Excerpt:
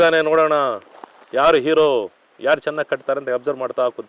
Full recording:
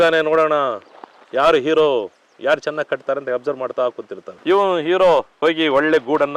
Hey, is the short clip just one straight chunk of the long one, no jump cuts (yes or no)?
yes